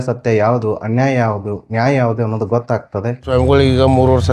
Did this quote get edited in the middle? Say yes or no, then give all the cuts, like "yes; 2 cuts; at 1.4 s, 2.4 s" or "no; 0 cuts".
yes; 1 cut; at 3.2 s